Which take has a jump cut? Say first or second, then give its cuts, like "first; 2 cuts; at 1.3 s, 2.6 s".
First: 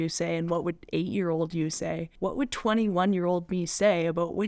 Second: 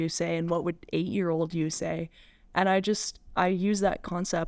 first; 1 cut; at 2.1 s